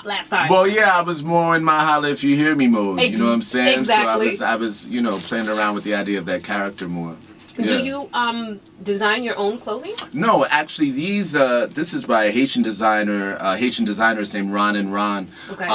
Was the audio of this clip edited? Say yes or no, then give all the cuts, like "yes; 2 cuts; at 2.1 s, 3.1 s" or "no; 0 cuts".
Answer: no; 0 cuts